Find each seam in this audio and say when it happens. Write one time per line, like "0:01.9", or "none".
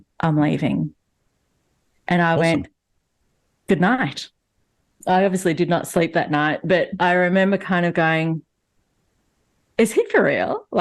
0:04.9